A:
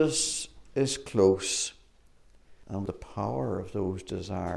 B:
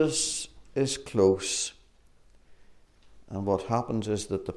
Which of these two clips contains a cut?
A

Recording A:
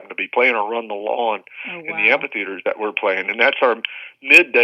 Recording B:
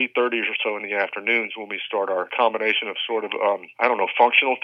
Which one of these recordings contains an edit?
B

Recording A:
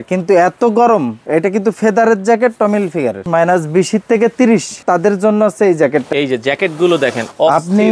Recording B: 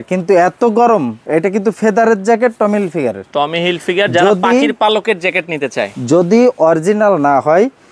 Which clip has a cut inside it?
A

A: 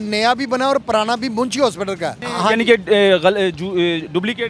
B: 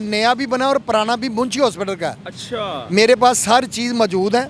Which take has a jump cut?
A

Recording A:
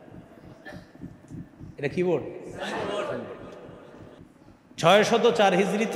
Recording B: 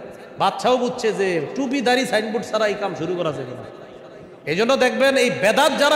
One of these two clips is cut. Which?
A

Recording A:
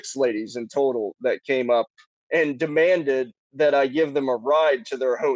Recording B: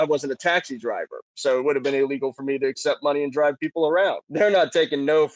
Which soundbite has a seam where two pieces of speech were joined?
B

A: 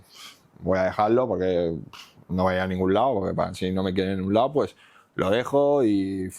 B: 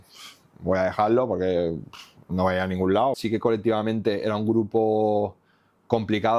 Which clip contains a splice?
B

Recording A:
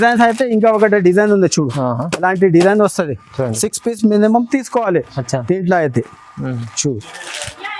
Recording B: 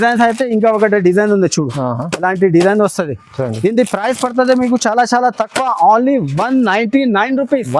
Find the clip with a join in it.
A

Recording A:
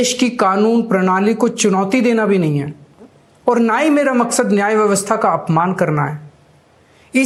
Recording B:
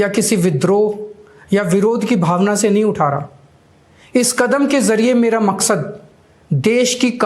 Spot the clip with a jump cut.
B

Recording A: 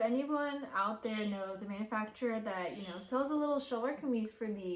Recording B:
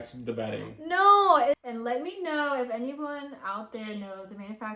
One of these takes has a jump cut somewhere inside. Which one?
B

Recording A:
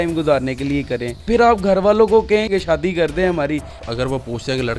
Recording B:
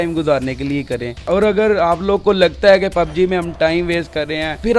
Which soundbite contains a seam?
A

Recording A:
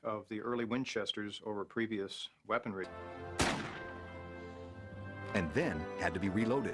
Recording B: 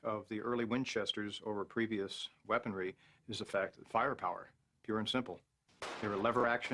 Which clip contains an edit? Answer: B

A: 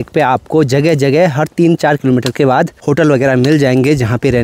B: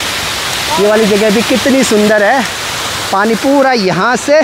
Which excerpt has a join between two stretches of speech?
A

